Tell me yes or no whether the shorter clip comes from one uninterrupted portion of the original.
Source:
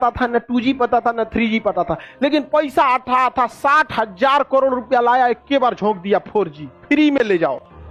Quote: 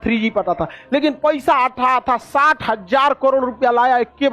yes